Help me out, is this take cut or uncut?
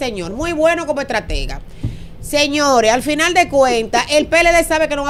uncut